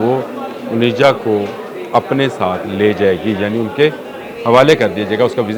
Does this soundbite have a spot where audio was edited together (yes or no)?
no